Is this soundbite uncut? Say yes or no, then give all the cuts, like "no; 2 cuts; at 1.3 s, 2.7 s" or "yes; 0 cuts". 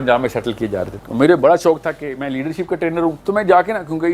no; 2 cuts; at 0.9 s, 3.2 s